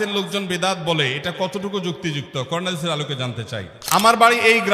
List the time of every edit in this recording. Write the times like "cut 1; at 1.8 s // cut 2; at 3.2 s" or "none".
cut 1; at 3.7 s